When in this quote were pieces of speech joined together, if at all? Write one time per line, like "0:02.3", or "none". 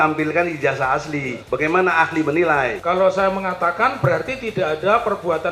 0:01.4
0:02.8